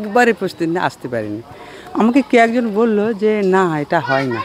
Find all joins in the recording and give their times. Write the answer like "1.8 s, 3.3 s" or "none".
none